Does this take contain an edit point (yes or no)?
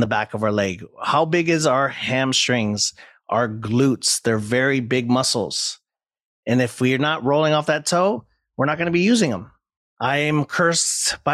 no